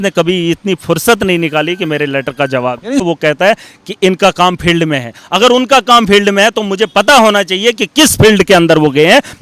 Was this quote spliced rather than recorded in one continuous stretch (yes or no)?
yes